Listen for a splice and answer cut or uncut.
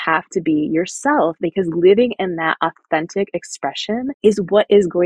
cut